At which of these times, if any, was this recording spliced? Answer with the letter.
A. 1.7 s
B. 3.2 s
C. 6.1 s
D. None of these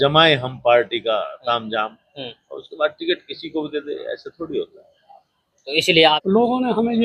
C